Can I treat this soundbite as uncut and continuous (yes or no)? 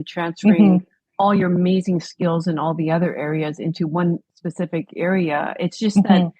no